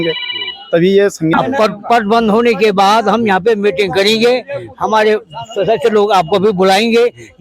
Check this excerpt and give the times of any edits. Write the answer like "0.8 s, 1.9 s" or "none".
1.3 s